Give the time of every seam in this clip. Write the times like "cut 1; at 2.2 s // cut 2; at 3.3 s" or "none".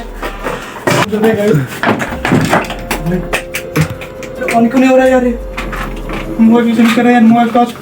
cut 1; at 1.1 s